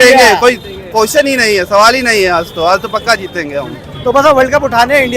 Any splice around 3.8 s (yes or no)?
yes